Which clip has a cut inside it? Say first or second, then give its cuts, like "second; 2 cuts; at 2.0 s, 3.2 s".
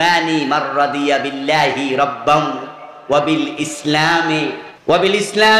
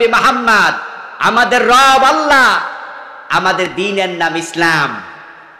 first; 1 cut; at 4.7 s